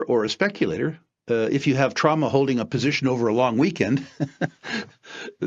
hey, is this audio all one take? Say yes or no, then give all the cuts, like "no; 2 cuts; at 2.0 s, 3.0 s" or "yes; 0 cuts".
no; 1 cut; at 1.1 s